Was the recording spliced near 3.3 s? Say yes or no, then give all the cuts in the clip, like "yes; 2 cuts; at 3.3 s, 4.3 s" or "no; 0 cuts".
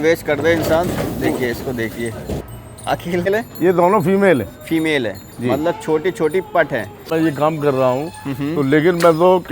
yes; 2 cuts; at 3.3 s, 7.0 s